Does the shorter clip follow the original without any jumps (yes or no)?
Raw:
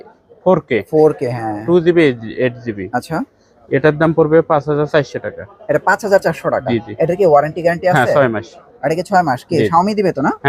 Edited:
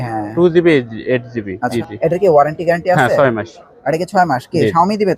no